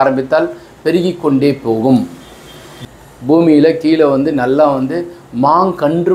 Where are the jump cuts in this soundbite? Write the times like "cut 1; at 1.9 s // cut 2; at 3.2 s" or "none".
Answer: cut 1; at 2.7 s

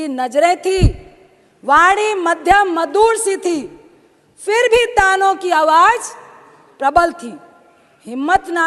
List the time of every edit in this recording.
none

